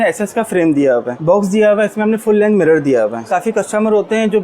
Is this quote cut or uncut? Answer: cut